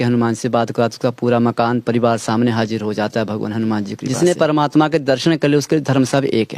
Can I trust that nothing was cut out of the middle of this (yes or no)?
no